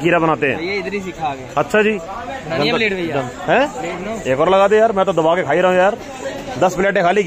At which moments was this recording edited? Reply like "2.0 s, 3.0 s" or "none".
2.1 s